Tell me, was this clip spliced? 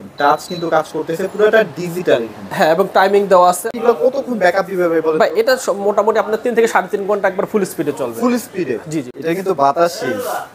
yes; 2 cuts; at 3.7 s, 9.1 s

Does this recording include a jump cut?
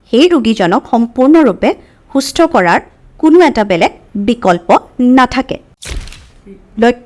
yes; 1 cut; at 5.9 s

